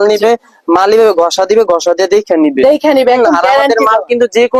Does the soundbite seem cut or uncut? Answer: uncut